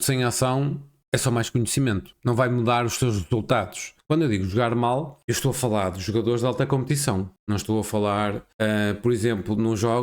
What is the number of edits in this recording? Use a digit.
6